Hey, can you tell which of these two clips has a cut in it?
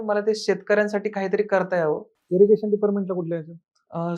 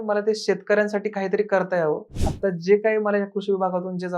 second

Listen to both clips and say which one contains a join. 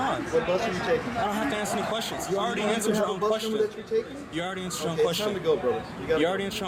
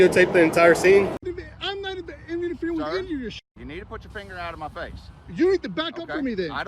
second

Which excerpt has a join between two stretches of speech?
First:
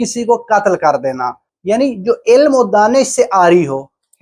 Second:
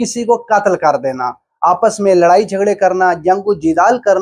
first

